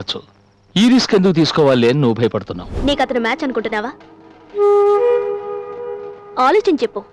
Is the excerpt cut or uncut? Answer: cut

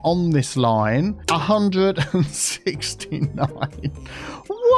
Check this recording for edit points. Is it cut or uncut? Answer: cut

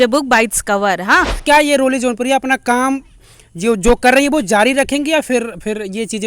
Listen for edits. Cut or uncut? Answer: cut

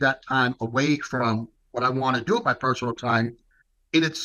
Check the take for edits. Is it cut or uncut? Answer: uncut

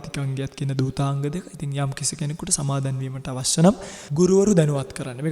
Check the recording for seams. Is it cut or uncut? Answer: cut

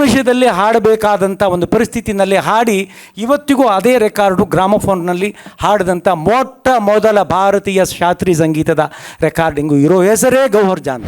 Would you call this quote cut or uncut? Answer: uncut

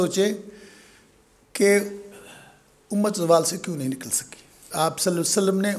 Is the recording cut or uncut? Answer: cut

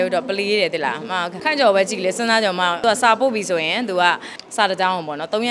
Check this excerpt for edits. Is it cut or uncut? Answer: cut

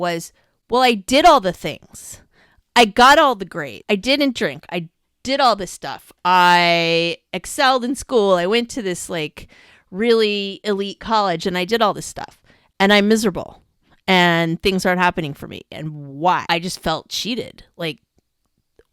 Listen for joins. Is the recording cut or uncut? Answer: cut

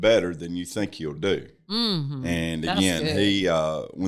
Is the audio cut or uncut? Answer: uncut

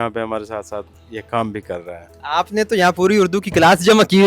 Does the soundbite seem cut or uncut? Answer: uncut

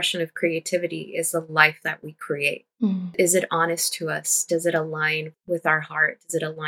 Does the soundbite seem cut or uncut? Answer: uncut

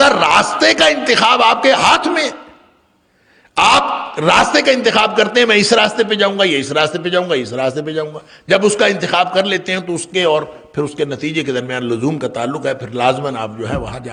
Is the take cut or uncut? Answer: uncut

